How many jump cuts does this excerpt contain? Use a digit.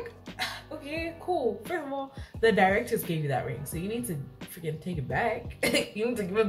0